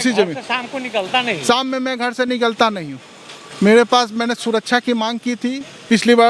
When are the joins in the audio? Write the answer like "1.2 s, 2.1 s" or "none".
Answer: none